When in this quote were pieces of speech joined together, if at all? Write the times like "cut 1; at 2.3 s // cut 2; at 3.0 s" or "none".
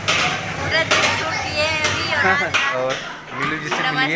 cut 1; at 2.7 s